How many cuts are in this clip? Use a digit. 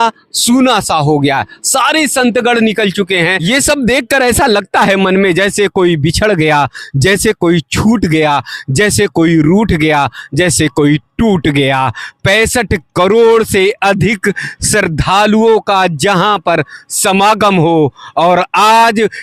1